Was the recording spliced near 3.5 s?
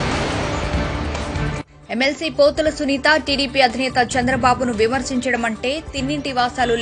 no; 1 cut; at 1.7 s

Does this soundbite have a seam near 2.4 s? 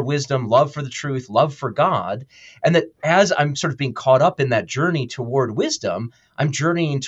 no; 0 cuts

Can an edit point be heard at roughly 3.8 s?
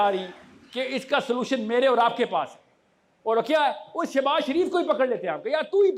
no; 0 cuts

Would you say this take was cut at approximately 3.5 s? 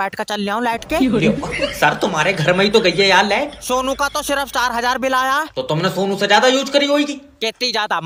no; 0 cuts

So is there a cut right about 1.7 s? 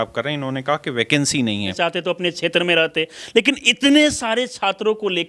yes; 1 cut; at 1.7 s

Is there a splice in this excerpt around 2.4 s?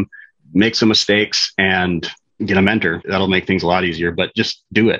yes; 1 cut; at 2.4 s

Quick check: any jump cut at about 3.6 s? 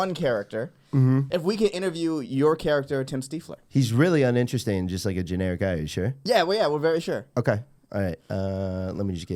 no; 1 cut; at 1.3 s

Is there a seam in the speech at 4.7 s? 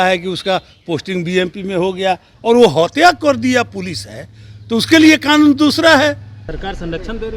no; 2 cuts; at 2.3 s, 6.4 s

